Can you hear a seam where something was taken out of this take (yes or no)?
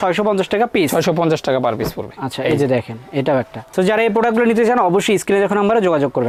no